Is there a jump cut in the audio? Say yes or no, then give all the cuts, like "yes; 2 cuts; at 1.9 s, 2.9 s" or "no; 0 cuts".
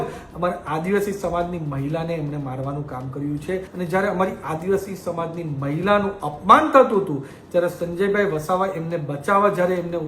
yes; 1 cut; at 3.7 s